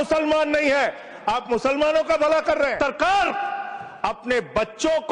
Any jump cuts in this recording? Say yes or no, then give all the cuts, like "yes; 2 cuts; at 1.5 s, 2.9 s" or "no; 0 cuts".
yes; 1 cut; at 2.8 s